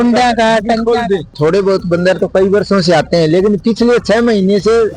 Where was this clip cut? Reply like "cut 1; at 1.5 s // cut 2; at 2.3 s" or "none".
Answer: cut 1; at 1.3 s